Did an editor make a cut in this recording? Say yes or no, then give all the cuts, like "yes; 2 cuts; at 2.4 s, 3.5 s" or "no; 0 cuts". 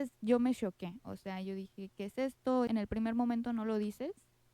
yes; 1 cut; at 2.7 s